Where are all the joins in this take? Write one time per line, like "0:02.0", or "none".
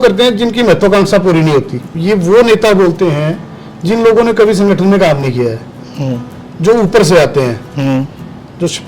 0:01.8